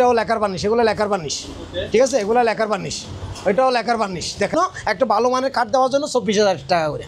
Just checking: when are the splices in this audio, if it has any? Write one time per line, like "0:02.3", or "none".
0:04.5